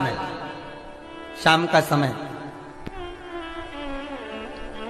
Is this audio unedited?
yes; 0 cuts

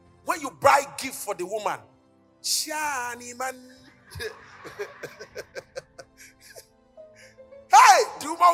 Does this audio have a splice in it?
no; 0 cuts

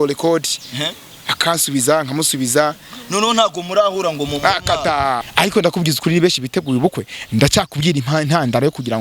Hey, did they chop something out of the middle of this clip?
yes; 1 cut; at 5.3 s

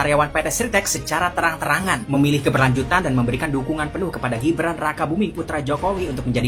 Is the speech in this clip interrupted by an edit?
no; 0 cuts

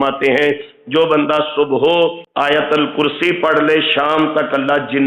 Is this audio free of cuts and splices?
no; 1 cut; at 2.2 s

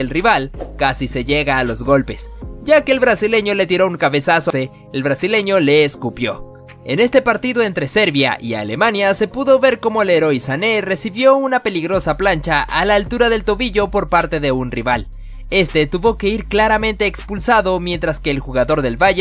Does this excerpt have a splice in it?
yes; 1 cut; at 4.5 s

